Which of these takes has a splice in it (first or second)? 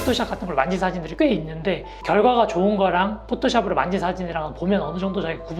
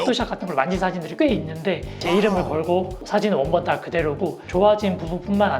second